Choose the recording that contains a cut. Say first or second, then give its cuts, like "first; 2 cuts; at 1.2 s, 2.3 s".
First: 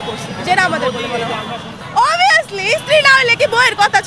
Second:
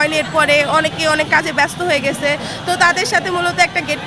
first; 1 cut; at 1.7 s